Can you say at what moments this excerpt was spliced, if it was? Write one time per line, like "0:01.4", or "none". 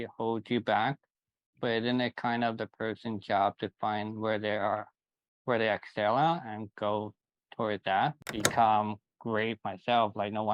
0:08.3